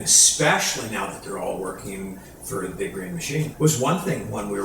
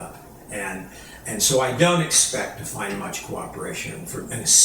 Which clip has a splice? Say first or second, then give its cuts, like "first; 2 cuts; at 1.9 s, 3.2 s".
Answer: first; 1 cut; at 3.5 s